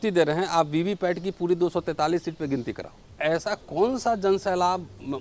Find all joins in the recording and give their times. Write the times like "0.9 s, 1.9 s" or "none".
3.1 s